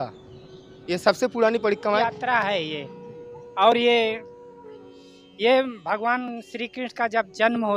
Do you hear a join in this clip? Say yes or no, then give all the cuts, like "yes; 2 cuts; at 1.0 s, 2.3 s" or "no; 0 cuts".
yes; 1 cut; at 1.8 s